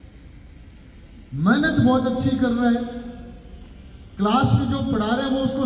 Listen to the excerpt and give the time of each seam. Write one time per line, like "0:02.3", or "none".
none